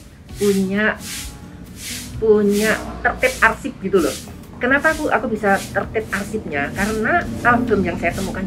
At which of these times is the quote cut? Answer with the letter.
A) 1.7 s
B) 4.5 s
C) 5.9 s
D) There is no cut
B